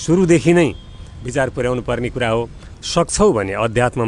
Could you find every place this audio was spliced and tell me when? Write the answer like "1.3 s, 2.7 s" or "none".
2.6 s